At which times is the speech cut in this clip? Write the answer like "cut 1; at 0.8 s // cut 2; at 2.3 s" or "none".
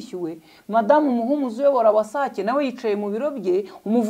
none